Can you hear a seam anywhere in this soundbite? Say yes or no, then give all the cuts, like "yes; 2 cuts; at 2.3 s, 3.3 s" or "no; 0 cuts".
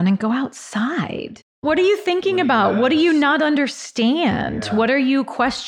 yes; 1 cut; at 1.4 s